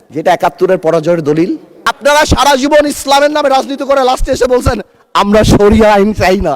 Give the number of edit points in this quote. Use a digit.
1